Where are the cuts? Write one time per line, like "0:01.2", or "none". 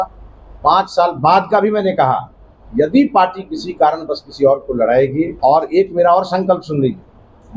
0:05.3

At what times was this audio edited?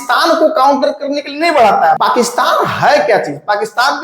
0:02.0

